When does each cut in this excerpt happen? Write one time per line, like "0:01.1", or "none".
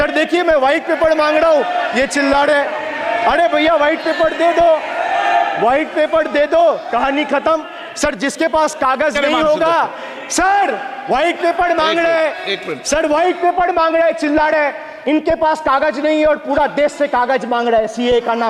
none